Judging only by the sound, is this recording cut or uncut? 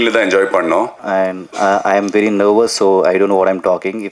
cut